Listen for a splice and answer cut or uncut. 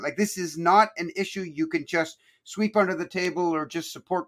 uncut